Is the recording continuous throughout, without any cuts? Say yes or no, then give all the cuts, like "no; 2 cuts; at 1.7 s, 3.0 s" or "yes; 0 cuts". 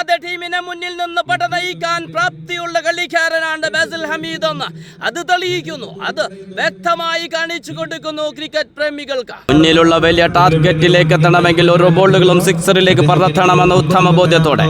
no; 1 cut; at 9.5 s